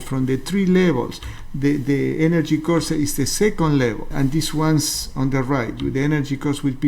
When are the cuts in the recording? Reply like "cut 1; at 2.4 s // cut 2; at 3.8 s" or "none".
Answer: cut 1; at 4.1 s